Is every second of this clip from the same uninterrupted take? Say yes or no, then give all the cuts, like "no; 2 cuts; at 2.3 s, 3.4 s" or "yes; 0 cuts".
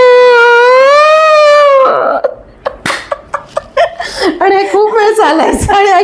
yes; 0 cuts